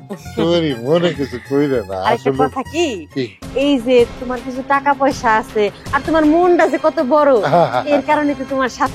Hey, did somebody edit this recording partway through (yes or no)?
no